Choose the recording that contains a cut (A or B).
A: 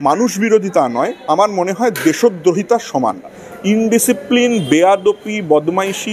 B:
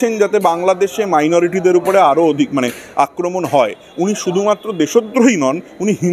A